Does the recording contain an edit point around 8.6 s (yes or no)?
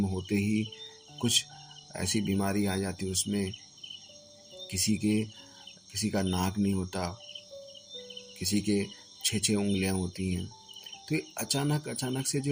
no